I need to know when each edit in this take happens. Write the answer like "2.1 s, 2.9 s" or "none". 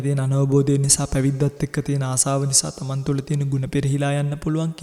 none